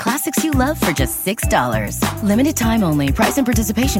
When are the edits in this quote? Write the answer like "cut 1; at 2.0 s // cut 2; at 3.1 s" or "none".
none

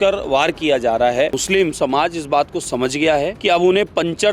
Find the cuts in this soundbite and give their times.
cut 1; at 1.4 s // cut 2; at 3.4 s

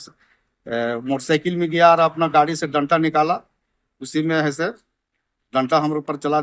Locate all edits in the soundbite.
none

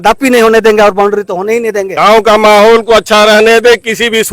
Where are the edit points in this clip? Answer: cut 1; at 1.8 s

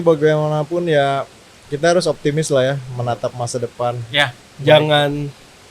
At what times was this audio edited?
cut 1; at 4.5 s

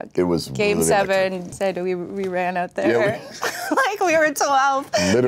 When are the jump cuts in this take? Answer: cut 1; at 1.5 s

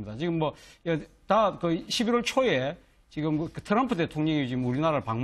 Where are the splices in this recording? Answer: none

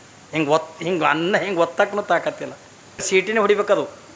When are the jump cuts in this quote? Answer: cut 1; at 3.1 s

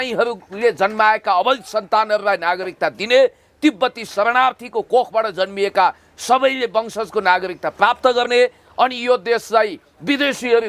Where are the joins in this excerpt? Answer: none

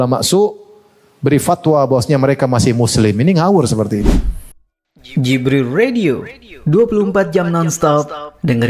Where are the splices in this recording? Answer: cut 1; at 4.0 s

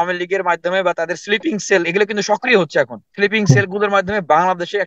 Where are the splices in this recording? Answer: cut 1; at 3.0 s

